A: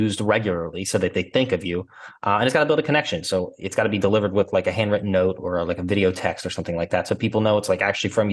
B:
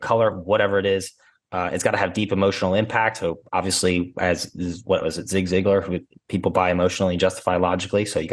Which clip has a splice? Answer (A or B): B